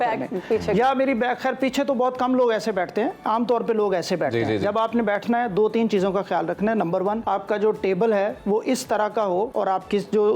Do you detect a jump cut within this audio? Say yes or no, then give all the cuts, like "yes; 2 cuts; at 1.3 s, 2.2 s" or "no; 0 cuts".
yes; 2 cuts; at 7.2 s, 9.5 s